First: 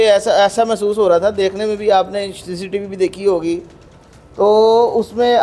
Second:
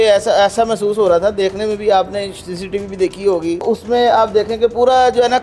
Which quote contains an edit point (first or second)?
second